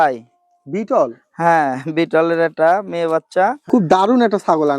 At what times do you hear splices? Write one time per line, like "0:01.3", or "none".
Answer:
0:03.6